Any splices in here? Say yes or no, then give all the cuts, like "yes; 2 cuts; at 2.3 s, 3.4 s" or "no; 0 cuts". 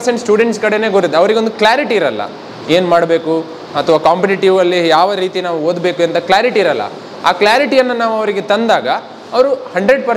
no; 0 cuts